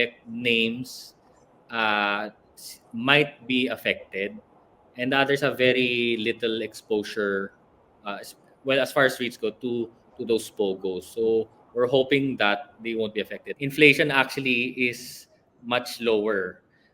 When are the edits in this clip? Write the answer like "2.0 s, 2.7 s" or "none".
13.4 s